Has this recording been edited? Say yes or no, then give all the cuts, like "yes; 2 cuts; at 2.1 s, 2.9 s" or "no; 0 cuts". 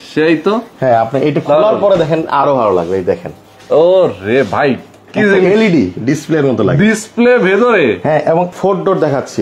yes; 1 cut; at 8.5 s